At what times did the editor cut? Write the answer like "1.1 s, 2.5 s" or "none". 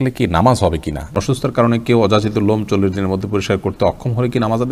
1.1 s